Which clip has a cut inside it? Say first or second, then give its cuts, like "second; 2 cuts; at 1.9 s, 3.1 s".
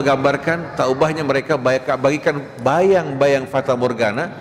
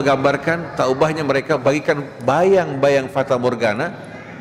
second; 1 cut; at 1.6 s